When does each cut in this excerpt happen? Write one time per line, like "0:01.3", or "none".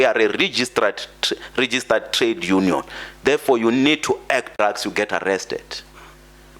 0:04.6